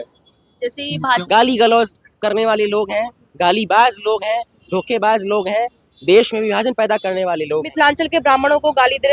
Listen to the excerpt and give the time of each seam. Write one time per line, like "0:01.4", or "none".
0:01.2
0:07.7